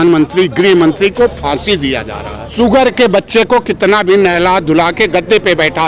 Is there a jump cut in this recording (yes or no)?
yes